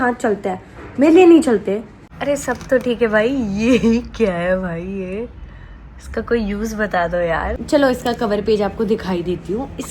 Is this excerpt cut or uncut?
cut